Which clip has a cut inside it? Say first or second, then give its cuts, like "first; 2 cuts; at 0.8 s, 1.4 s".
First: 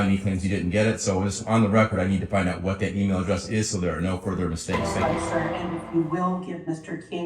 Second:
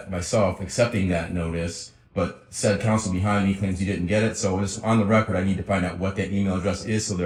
first; 1 cut; at 5.0 s